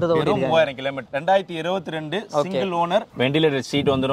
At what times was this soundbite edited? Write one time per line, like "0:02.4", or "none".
0:01.0
0:03.1

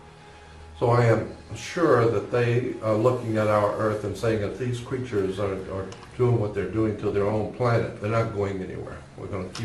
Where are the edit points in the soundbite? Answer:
0:07.9

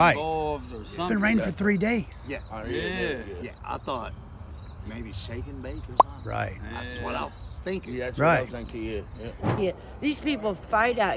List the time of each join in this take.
0:03.6
0:09.6

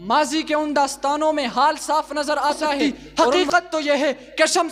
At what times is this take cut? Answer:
0:02.8

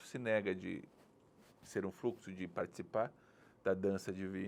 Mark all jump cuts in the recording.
none

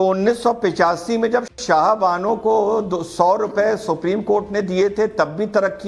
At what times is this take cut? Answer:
none

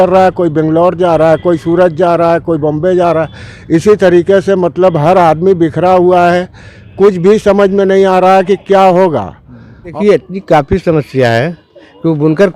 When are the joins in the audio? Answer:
0:09.9

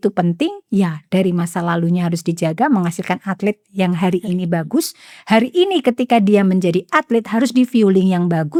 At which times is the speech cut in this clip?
none

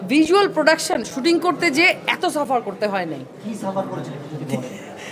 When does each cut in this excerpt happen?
none

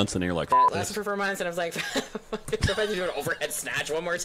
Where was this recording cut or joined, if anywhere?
none

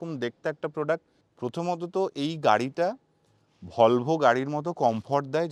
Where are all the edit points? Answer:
0:01.2

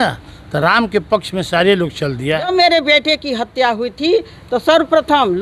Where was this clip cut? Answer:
0:02.5

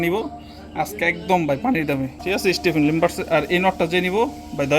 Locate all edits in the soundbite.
0:01.6

